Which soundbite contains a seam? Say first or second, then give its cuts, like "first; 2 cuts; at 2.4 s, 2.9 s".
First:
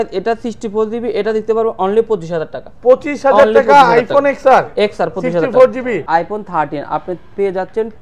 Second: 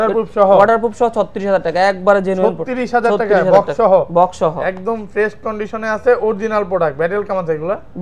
first; 1 cut; at 6.1 s